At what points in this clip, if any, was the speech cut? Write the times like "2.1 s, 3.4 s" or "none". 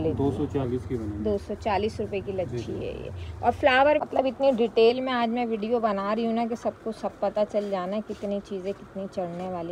4.0 s